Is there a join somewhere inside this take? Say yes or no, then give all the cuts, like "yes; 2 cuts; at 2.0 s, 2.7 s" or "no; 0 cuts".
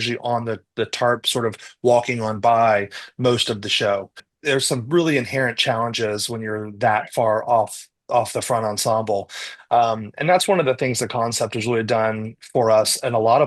yes; 1 cut; at 4.3 s